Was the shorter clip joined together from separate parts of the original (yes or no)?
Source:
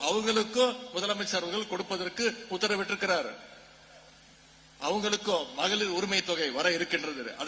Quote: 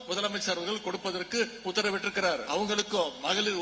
yes